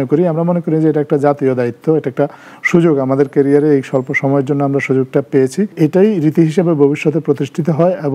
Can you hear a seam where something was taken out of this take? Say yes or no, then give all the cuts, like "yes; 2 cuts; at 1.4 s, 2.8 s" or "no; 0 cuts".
yes; 1 cut; at 5.7 s